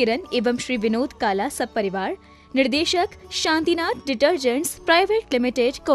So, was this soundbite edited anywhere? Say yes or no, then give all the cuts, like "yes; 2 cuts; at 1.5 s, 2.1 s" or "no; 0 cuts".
no; 0 cuts